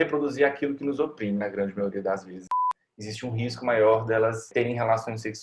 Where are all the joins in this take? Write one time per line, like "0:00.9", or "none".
0:02.5
0:04.5